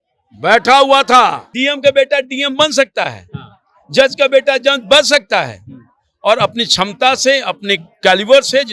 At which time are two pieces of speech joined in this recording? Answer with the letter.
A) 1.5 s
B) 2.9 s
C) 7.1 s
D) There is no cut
A